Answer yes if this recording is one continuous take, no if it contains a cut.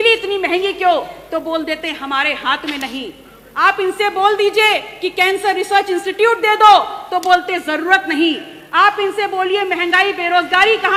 yes